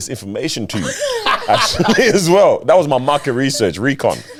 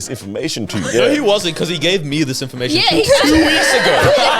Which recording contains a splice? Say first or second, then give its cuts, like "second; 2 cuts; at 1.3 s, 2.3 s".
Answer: second; 1 cut; at 0.9 s